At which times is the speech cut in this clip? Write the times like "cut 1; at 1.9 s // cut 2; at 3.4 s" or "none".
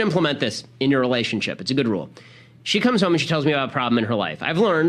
cut 1; at 1.9 s